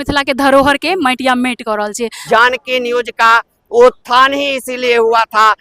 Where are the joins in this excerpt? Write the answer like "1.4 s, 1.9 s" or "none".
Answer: 2.1 s